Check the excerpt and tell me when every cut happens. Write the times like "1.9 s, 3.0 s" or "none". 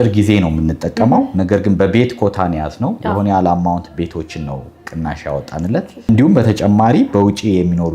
6.0 s